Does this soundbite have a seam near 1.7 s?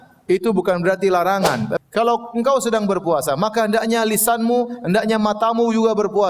yes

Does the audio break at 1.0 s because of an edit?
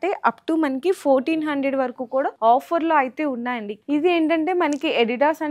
no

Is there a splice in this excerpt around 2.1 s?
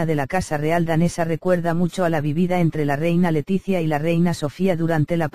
no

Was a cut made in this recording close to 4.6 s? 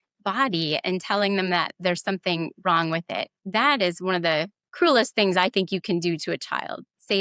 no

